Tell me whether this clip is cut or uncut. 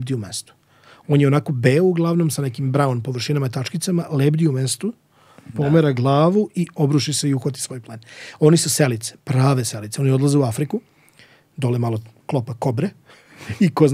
uncut